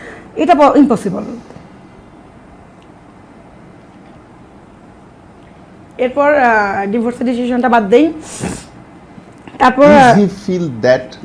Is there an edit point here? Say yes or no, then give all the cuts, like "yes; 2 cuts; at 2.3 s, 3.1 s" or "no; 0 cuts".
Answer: no; 0 cuts